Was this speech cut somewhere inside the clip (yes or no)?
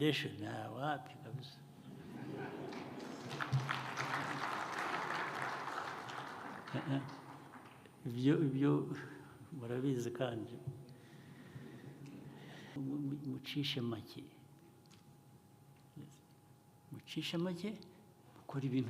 yes